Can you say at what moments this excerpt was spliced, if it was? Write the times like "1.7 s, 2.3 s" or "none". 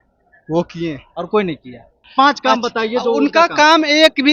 2.0 s

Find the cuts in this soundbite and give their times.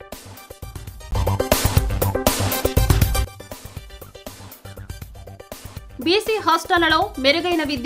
1.0 s, 3.3 s, 5.4 s

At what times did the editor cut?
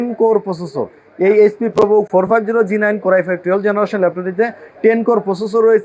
none

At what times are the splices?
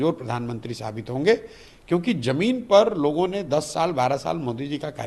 none

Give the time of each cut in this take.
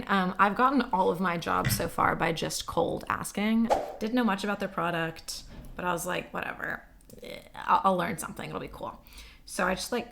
3.8 s

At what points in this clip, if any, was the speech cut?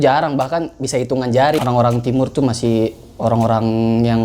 1.6 s

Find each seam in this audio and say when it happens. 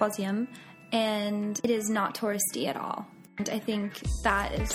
1.6 s, 3.4 s

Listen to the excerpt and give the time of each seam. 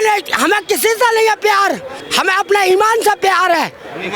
2.0 s

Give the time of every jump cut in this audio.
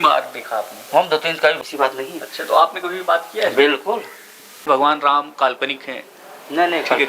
1.6 s, 4.6 s

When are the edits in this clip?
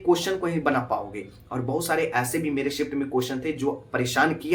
none

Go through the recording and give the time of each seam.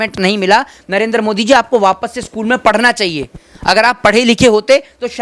none

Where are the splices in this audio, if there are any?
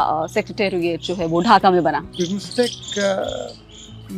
2.1 s

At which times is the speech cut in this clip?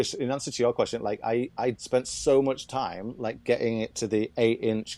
1.8 s

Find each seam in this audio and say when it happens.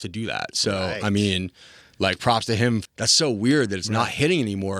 2.8 s

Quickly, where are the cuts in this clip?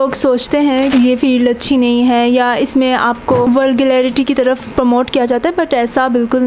0.9 s, 3.5 s

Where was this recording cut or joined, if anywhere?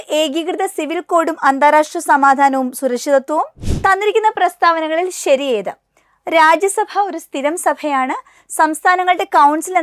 3.6 s

